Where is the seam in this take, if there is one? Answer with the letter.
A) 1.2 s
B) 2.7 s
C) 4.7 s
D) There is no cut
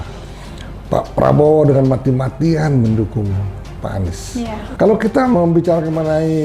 C